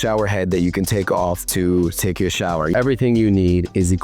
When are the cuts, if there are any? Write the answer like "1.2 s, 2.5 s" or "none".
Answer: 1.4 s, 2.7 s